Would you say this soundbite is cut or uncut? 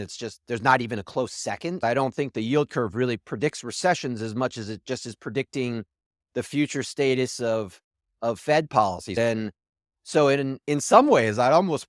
cut